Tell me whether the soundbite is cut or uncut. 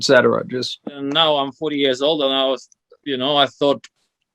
cut